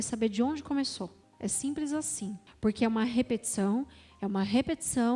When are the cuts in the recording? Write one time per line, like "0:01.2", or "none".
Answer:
0:01.2
0:02.5